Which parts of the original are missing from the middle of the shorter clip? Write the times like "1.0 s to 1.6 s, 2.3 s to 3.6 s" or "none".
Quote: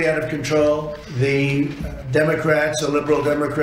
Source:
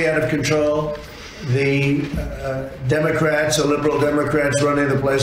1.0 s to 1.3 s, 2.3 s to 2.7 s